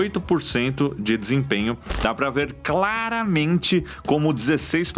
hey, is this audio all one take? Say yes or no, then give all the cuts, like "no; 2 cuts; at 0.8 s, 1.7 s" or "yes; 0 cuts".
no; 1 cut; at 1.9 s